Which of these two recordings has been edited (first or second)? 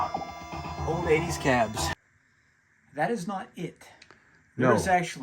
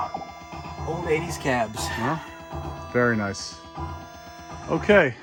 first